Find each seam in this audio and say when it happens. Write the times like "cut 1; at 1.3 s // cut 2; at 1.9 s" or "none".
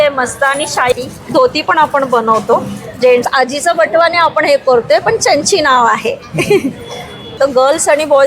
cut 1; at 3.3 s // cut 2; at 7.4 s